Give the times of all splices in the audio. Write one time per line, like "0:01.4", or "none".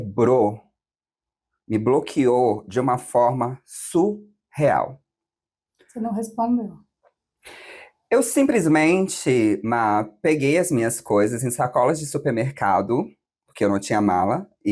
none